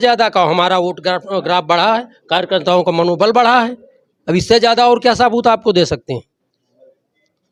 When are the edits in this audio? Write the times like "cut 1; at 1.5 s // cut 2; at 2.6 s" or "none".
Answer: none